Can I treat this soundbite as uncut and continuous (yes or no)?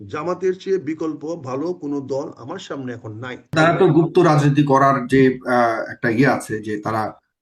no